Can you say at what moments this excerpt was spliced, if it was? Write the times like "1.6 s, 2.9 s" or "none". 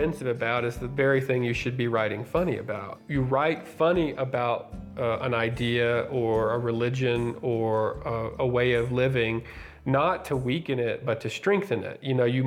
3.0 s